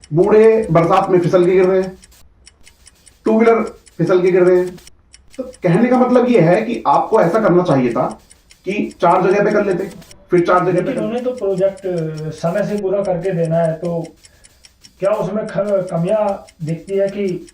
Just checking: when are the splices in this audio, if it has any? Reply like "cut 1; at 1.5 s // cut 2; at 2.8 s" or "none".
cut 1; at 10.9 s